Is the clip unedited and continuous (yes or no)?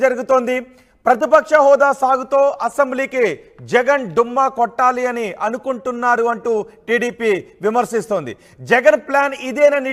yes